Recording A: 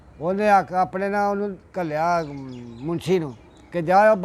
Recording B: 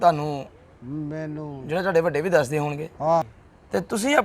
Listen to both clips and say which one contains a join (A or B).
B